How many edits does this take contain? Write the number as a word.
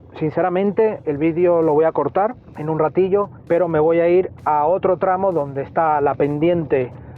two